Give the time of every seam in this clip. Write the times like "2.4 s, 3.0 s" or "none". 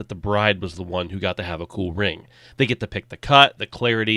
none